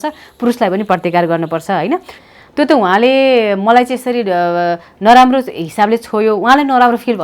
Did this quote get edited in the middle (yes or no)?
yes